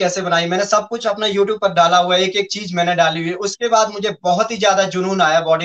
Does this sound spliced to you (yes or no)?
no